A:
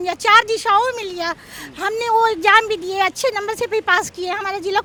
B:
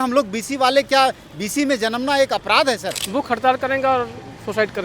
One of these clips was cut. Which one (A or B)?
B